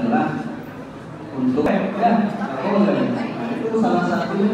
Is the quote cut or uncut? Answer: uncut